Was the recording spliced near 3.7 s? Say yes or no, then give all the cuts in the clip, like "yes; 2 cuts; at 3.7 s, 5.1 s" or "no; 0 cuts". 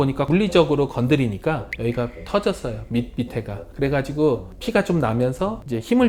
no; 0 cuts